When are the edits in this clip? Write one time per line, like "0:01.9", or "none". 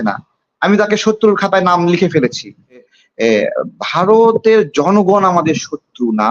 0:02.9